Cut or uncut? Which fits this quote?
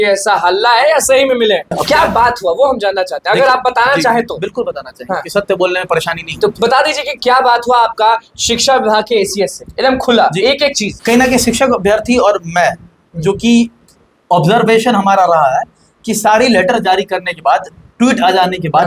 cut